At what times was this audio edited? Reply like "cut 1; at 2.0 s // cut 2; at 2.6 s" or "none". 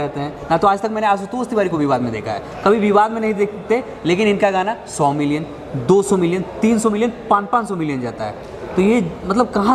none